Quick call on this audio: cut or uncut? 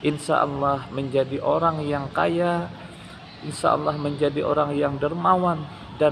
uncut